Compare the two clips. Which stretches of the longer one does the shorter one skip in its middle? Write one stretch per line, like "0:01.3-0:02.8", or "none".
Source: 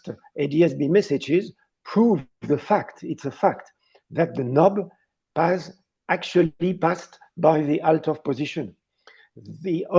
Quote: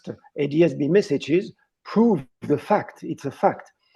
none